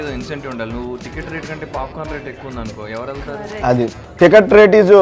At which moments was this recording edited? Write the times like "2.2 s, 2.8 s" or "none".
4.0 s